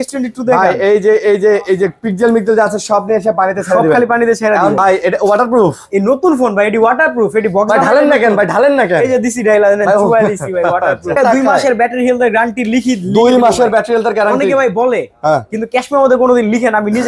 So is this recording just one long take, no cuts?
no; 2 cuts; at 4.8 s, 11.2 s

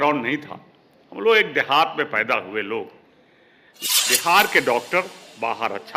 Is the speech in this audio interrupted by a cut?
yes; 1 cut; at 3.6 s

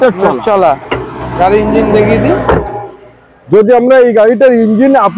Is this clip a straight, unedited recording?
yes; 0 cuts

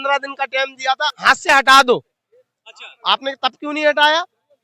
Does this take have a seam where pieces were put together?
yes; 1 cut; at 1.1 s

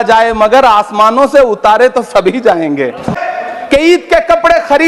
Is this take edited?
yes; 1 cut; at 3.2 s

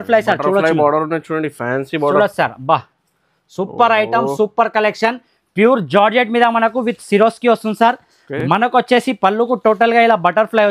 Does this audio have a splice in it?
no; 0 cuts

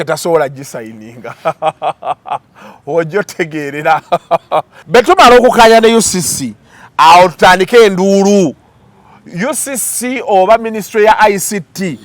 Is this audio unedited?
no; 1 cut; at 4.8 s

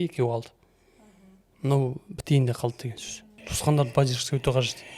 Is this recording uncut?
no; 1 cut; at 3.6 s

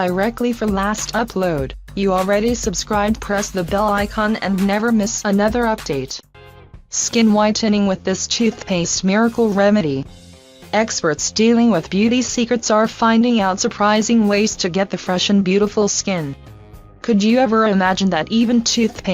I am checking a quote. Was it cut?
yes; 1 cut; at 14.3 s

